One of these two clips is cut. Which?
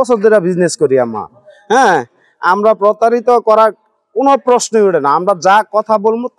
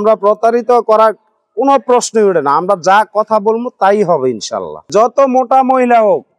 second; 1 cut; at 4.8 s

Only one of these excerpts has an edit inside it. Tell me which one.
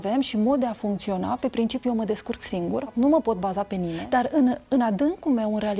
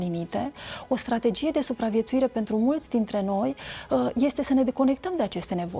first; 2 cuts; at 2.9 s, 4.0 s

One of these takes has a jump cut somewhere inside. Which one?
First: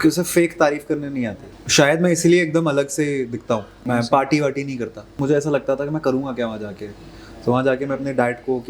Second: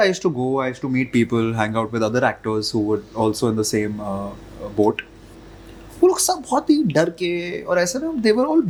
first; 3 cuts; at 1.4 s, 3.8 s, 5.2 s

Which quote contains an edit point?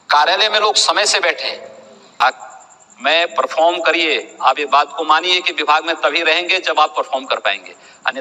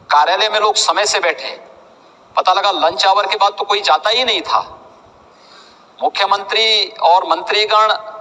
first; 1 cut; at 2.2 s

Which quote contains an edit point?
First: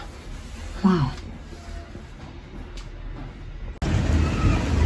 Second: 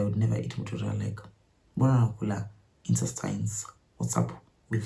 first; 1 cut; at 3.8 s

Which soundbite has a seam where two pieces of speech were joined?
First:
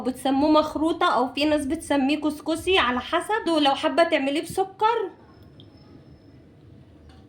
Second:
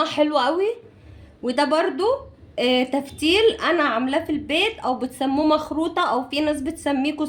first; 1 cut; at 3.4 s

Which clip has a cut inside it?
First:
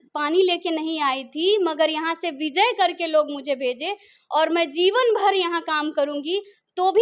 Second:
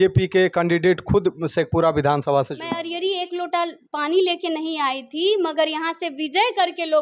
second; 1 cut; at 2.8 s

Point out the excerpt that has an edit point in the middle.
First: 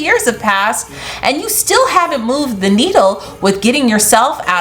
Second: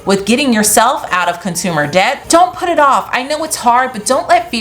second; 1 cut; at 2.2 s

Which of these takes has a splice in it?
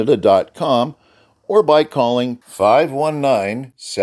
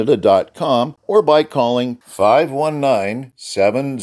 second; 1 cut; at 1.0 s

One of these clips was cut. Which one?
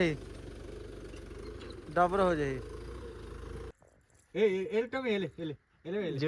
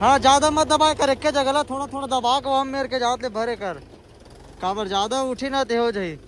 first; 1 cut; at 3.7 s

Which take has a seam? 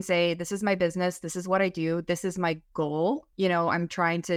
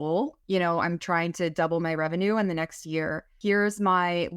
second; 1 cut; at 3.3 s

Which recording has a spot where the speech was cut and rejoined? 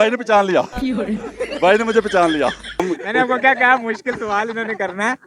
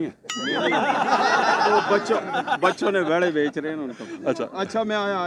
first; 1 cut; at 2.8 s

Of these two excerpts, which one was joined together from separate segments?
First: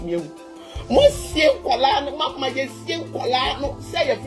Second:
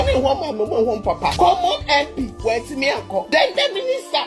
second; 2 cuts; at 1.3 s, 3.3 s

